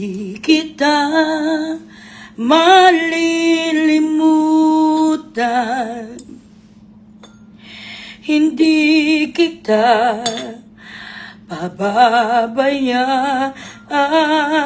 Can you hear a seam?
no; 0 cuts

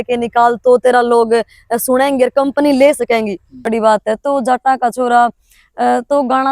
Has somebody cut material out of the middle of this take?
yes; 1 cut; at 3.7 s

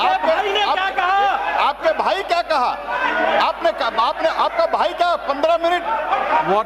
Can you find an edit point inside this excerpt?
no; 0 cuts

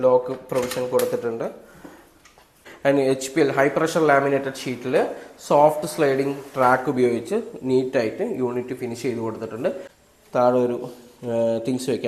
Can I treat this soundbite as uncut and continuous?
no; 2 cuts; at 2.6 s, 9.9 s

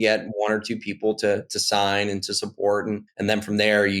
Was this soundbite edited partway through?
yes; 1 cut; at 3.1 s

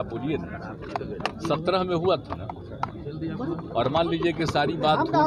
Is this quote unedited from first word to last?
yes; 0 cuts

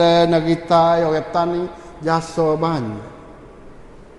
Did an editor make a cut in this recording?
no; 0 cuts

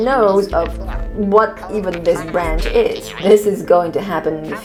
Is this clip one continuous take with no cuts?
yes; 0 cuts

